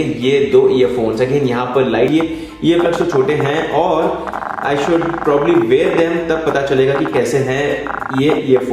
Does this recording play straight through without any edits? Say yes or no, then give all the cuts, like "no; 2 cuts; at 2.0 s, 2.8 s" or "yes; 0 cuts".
no; 1 cut; at 2.1 s